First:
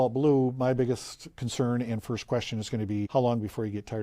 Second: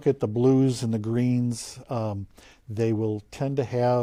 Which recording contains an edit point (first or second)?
first